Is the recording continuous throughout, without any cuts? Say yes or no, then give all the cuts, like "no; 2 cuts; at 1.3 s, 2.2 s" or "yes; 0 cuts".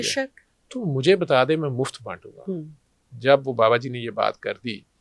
no; 1 cut; at 2.8 s